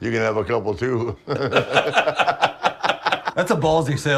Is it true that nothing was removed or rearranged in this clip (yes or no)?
no